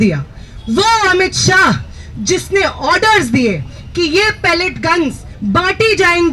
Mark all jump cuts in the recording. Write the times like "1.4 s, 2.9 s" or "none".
none